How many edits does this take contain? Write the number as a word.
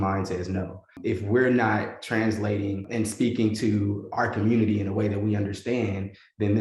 two